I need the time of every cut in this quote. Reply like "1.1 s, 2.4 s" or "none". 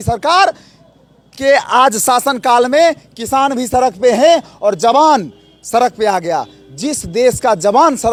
none